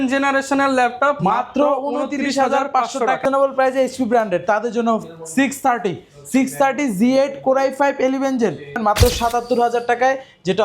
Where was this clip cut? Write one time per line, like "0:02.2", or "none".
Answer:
0:03.2
0:08.8